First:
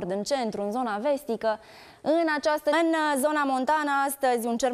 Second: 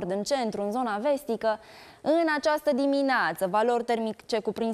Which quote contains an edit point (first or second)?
second